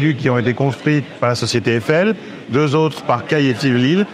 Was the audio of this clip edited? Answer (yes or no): no